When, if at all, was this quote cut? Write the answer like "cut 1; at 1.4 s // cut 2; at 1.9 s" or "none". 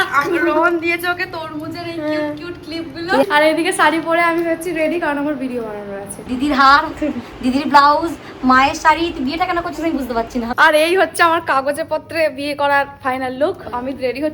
cut 1; at 3.2 s // cut 2; at 6.1 s // cut 3; at 10.5 s